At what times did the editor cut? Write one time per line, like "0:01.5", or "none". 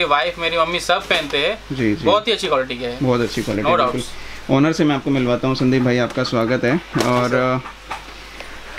none